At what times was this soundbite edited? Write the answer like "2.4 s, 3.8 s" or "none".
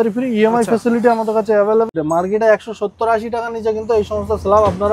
1.9 s

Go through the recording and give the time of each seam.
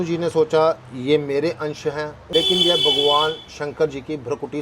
2.2 s

